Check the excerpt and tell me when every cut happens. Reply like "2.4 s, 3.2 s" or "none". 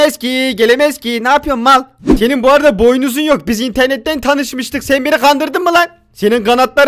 2.0 s